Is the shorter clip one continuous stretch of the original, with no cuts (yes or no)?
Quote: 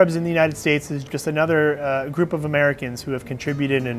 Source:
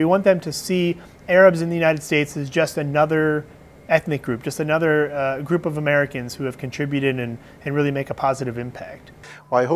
no